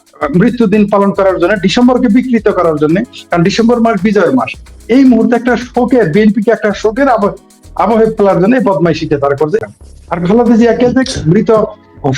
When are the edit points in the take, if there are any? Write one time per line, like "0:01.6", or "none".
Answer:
0:09.7

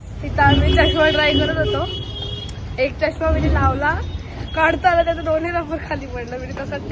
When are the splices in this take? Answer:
none

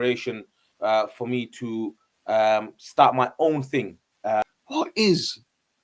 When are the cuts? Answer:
0:04.4

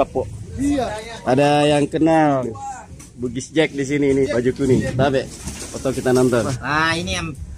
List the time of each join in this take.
0:01.0
0:04.3
0:06.5

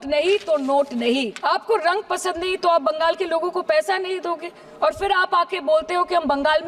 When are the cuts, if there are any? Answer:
0:01.3

